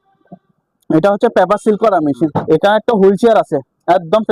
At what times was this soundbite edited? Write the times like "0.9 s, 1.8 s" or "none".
2.4 s